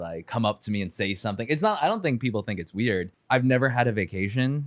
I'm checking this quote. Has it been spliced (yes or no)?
yes